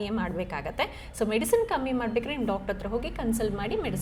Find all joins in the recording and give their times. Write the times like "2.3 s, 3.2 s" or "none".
none